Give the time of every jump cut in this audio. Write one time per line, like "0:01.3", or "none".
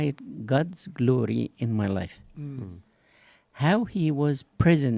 none